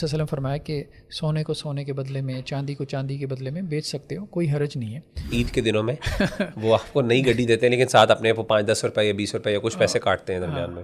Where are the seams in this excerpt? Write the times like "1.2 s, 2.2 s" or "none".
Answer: 5.3 s